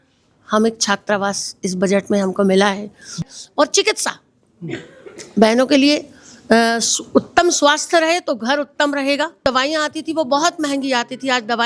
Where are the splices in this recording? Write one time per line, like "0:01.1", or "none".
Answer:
0:03.3
0:09.4